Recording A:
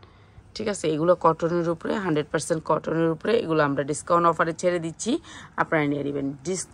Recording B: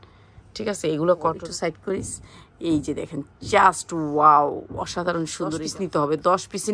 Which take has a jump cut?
B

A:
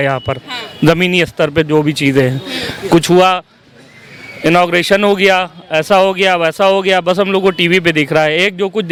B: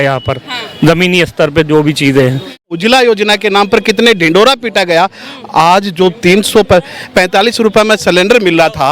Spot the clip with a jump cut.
B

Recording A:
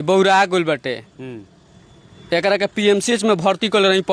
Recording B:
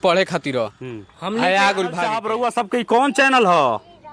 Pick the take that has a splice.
B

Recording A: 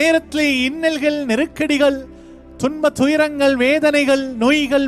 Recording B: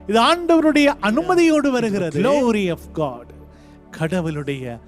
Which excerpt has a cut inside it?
B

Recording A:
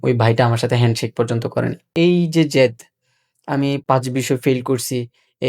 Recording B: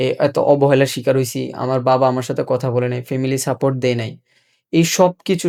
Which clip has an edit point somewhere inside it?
A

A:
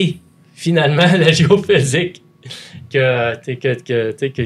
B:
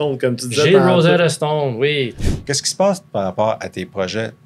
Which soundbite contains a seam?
B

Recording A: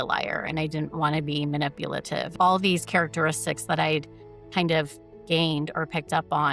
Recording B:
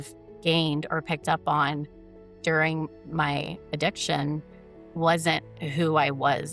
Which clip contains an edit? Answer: A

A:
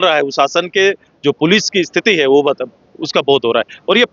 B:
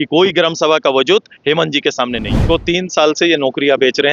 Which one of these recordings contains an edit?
B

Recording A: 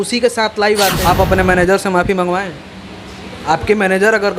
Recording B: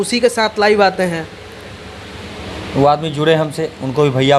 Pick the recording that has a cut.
A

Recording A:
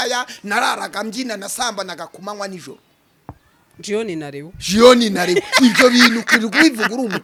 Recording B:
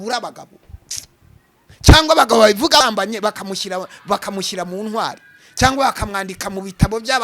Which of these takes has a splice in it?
B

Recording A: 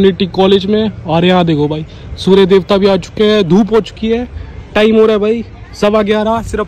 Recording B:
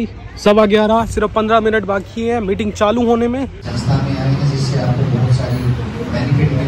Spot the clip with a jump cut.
B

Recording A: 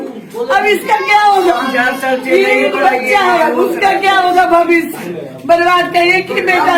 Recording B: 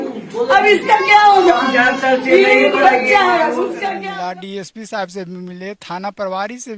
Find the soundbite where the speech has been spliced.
B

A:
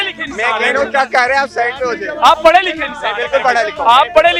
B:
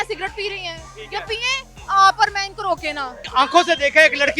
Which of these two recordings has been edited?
B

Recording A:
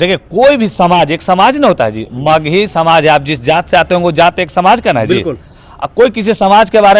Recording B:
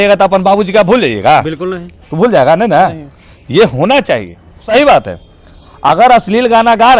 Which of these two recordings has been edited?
B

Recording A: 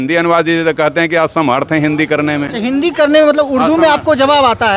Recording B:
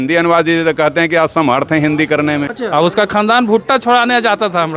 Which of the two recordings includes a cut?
B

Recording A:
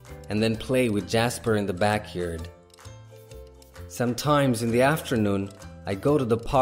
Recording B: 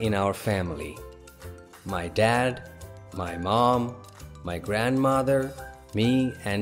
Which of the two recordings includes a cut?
A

